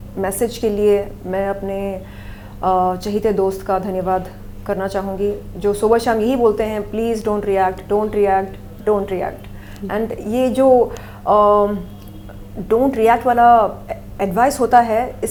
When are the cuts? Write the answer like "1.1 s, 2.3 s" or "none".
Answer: none